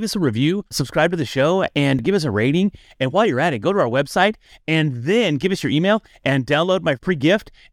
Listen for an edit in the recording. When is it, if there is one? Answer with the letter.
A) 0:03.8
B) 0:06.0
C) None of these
C